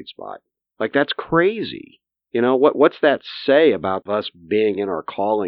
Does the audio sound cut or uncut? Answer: cut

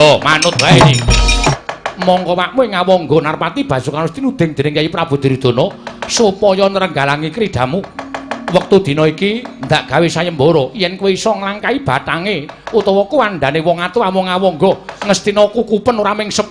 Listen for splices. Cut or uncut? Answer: cut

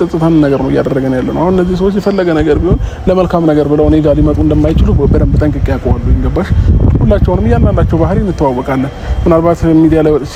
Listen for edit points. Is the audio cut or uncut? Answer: uncut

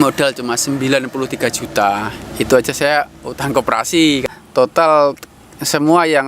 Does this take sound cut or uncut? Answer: cut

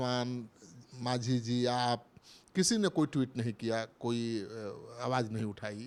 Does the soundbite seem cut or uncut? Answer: uncut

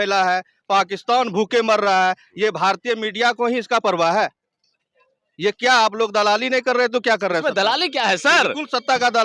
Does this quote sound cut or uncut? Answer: uncut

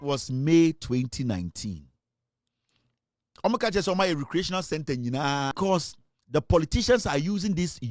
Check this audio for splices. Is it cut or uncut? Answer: cut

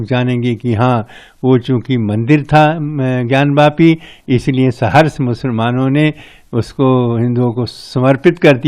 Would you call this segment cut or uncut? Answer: uncut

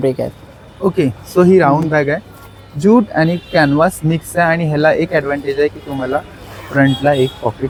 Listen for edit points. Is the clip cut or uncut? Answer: uncut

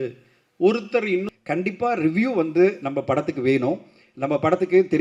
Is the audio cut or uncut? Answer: cut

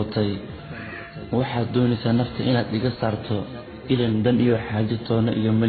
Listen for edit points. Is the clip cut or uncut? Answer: uncut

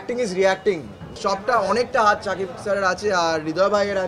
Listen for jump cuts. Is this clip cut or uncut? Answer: cut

